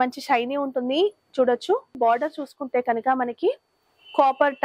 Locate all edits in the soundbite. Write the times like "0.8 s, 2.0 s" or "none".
2.0 s